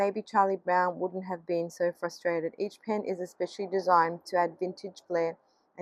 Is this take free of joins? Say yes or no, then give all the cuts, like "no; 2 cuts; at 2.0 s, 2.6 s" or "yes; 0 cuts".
yes; 0 cuts